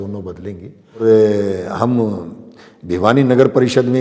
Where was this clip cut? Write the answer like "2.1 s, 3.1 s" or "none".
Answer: 1.0 s